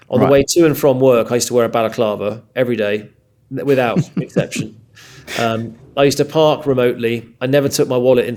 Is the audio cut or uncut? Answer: uncut